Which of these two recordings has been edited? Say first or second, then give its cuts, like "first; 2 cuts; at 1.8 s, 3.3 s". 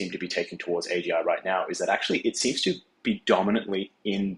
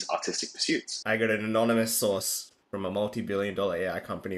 second; 1 cut; at 0.9 s